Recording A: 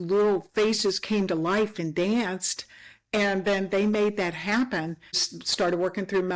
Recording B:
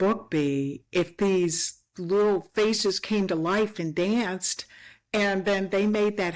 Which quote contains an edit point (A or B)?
A